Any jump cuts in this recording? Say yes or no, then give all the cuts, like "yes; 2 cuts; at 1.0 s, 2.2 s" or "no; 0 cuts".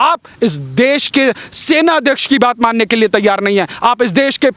no; 0 cuts